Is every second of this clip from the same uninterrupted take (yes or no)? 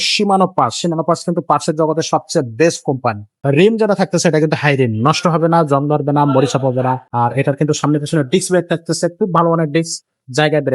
no